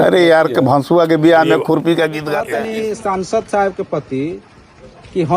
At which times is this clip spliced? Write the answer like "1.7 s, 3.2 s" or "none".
2.4 s